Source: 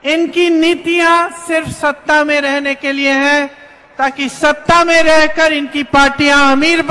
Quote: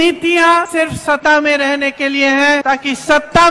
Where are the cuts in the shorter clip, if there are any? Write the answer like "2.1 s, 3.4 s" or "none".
1.0 s, 2.6 s